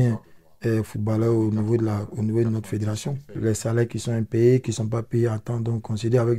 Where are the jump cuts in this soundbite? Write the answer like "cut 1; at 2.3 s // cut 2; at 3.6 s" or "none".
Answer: cut 1; at 3.4 s